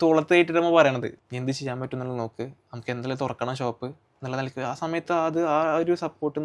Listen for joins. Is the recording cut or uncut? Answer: cut